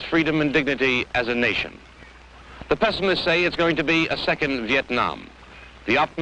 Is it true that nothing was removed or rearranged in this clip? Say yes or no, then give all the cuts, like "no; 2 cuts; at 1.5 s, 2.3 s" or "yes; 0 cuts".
no; 1 cut; at 3.7 s